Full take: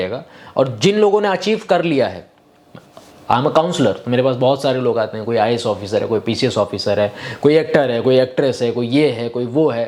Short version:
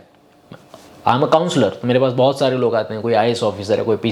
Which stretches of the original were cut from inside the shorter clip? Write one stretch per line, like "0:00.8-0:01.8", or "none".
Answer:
none

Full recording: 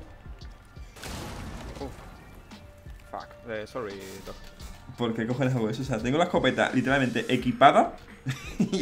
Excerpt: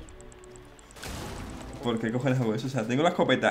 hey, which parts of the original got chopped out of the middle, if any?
0:01.7-0:04.9

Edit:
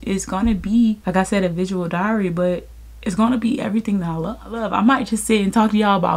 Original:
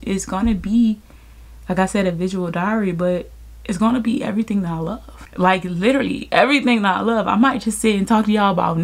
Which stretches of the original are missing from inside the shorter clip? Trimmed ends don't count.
0:01.0-0:01.7
0:05.2-0:07.1

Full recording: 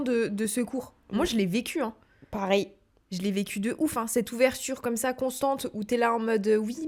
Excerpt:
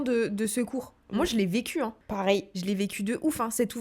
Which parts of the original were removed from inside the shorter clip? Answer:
0:02.2-0:02.8

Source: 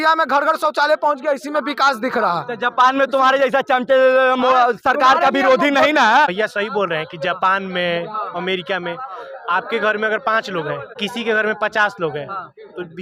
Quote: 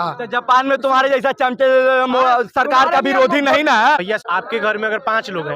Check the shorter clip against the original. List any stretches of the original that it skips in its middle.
0:06.5-0:09.4

